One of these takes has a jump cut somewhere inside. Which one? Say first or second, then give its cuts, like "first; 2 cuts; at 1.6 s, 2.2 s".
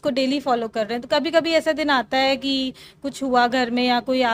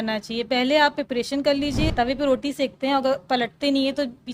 second; 1 cut; at 1.9 s